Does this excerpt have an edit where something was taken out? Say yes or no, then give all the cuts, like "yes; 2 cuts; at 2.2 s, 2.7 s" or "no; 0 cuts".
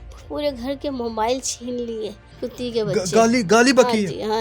yes; 1 cut; at 2.2 s